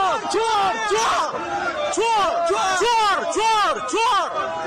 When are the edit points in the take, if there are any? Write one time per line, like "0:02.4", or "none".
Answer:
none